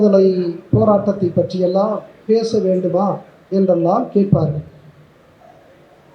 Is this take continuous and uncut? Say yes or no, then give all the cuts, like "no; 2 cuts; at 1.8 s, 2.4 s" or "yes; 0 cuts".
yes; 0 cuts